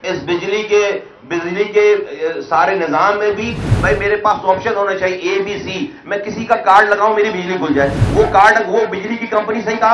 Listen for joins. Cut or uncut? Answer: uncut